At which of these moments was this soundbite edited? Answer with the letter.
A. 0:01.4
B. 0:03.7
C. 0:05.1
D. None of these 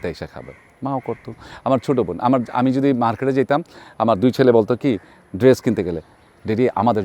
D